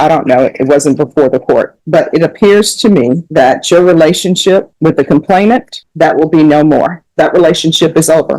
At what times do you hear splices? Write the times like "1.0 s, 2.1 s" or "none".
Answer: 1.8 s, 3.2 s, 4.7 s, 5.8 s, 7.0 s